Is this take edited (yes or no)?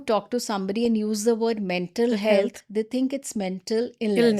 no